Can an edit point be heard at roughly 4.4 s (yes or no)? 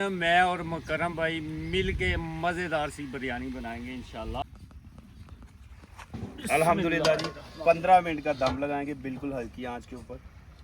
yes